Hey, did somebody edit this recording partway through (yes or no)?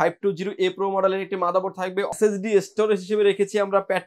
yes